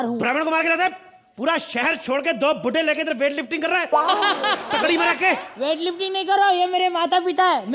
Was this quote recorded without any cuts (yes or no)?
yes